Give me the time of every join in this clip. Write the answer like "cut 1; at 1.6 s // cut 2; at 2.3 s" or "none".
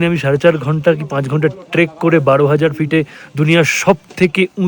none